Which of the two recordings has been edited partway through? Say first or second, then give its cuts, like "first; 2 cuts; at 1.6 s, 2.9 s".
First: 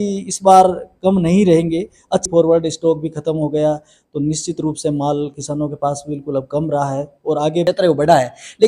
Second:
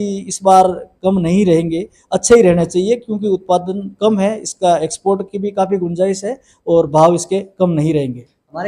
first; 2 cuts; at 2.2 s, 7.6 s